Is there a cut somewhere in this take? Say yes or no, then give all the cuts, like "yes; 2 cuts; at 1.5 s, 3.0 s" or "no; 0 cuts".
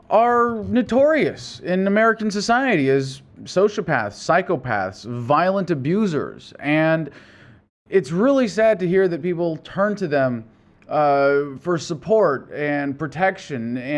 yes; 1 cut; at 5.2 s